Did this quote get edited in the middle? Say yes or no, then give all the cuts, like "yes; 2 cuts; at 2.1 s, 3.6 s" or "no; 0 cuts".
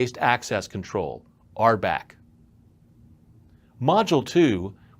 yes; 1 cut; at 3.1 s